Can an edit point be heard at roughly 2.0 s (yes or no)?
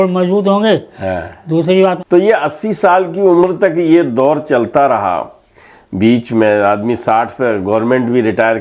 yes